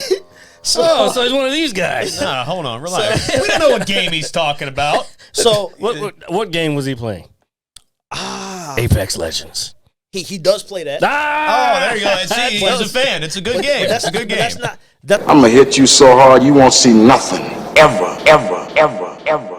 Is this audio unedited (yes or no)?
no